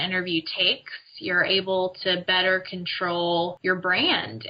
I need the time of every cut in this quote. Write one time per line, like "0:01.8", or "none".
0:03.6